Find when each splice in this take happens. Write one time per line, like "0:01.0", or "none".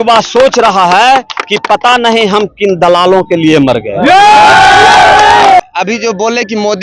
0:05.6